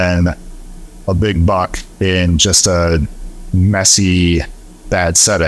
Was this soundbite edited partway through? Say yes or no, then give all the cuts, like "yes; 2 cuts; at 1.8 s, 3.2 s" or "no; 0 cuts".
no; 0 cuts